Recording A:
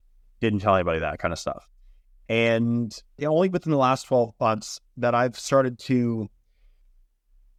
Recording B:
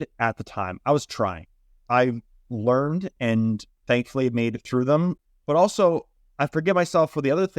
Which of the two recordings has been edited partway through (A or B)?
B